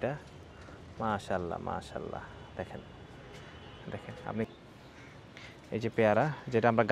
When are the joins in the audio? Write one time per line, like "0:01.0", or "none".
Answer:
0:04.4